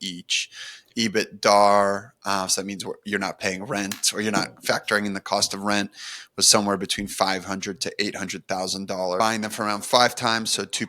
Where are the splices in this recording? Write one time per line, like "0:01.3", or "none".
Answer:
0:09.2